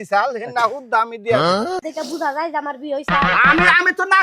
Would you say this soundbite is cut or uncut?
cut